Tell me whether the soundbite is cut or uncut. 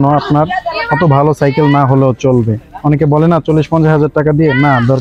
uncut